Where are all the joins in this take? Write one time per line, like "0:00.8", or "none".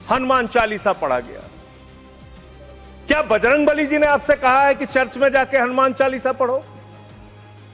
none